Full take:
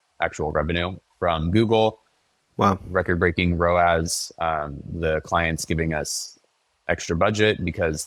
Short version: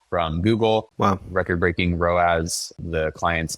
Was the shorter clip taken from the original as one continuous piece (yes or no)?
no